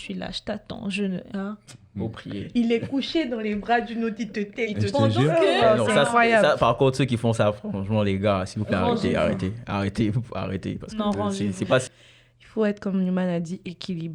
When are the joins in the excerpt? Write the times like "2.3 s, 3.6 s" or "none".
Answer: 11.9 s